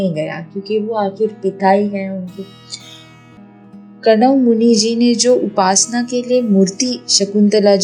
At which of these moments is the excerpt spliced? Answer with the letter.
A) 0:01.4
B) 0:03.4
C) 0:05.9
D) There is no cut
B